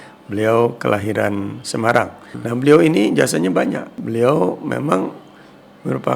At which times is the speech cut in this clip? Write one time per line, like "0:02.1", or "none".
0:02.3
0:03.9

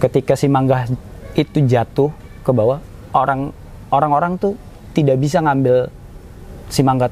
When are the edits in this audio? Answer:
none

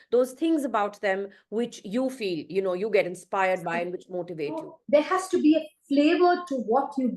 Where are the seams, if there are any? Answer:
0:04.8

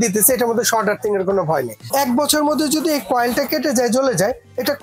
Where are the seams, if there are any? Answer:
0:01.8

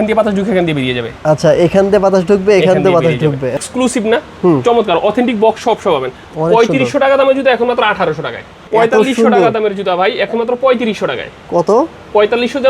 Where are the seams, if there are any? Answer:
0:03.5
0:08.6

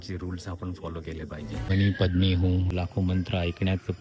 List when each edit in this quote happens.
0:01.7
0:02.7

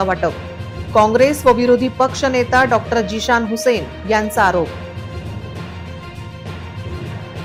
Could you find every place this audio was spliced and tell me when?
none

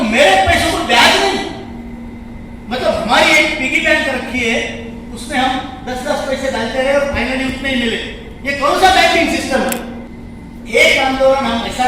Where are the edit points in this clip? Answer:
0:09.9

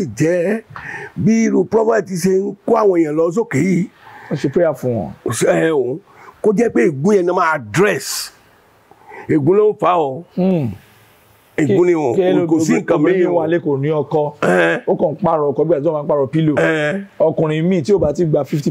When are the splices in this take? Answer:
none

